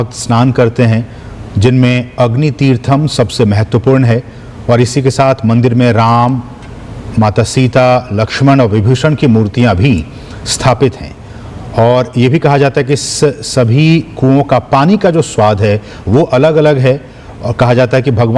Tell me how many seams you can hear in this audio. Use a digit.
1